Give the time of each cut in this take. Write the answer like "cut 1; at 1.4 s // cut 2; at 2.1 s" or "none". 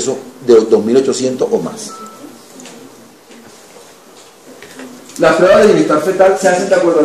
cut 1; at 3.5 s